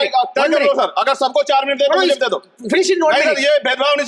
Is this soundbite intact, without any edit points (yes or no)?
yes